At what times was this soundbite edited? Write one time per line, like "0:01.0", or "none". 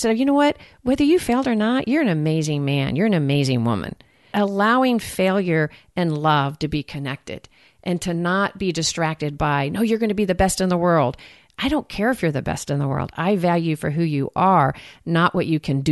0:04.3